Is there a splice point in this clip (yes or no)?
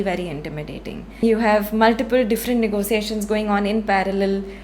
yes